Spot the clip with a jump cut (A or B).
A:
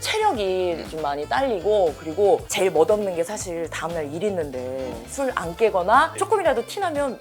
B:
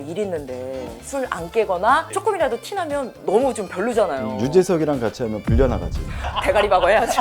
B